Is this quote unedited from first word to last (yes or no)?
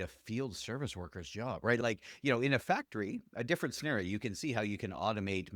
no